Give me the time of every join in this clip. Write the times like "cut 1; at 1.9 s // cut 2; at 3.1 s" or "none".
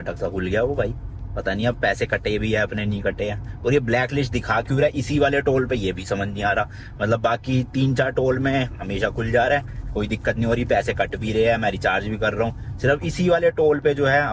none